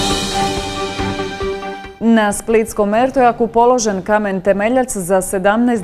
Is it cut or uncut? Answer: cut